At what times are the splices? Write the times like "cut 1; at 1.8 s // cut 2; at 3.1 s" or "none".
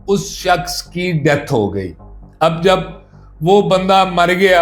none